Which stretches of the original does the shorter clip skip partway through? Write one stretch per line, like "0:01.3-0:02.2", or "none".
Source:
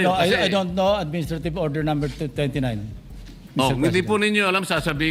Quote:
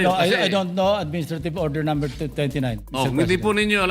0:02.9-0:03.5